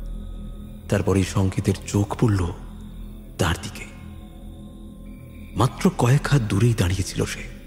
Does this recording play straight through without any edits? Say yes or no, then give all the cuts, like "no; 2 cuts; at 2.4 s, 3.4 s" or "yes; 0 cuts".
yes; 0 cuts